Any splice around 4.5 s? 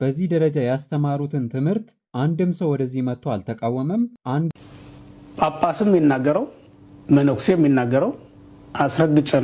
yes; 1 cut; at 4.5 s

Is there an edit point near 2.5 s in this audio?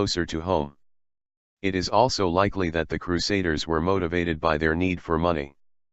yes; 1 cut; at 2.5 s

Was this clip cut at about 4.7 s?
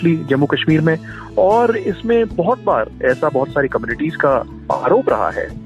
yes; 1 cut; at 4.7 s

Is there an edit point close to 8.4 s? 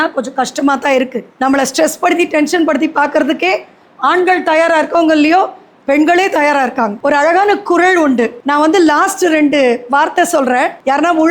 yes; 2 cuts; at 7.0 s, 8.4 s

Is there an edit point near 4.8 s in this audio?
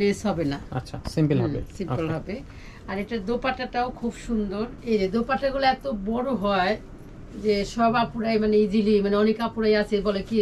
yes; 1 cut; at 4.8 s

